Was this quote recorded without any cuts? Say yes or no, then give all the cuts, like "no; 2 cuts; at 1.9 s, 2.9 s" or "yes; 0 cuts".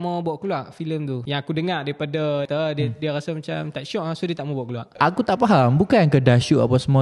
no; 3 cuts; at 1.2 s, 2.5 s, 4.9 s